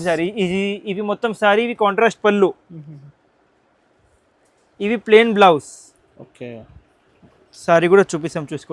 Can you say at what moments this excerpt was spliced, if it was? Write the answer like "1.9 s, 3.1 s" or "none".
none